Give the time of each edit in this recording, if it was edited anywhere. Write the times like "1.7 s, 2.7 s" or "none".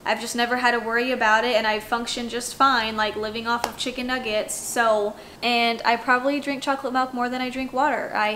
5.3 s